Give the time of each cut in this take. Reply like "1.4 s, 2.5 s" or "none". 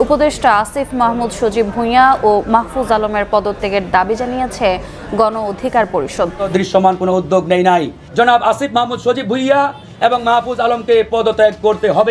6.4 s